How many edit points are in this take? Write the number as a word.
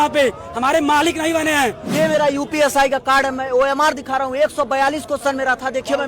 one